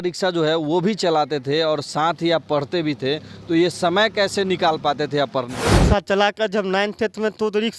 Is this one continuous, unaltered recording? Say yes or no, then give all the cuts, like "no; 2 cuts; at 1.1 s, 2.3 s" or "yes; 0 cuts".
no; 1 cut; at 5.6 s